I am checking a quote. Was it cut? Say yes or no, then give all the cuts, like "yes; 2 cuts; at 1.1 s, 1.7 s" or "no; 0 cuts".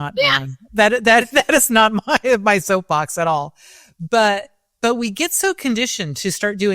no; 0 cuts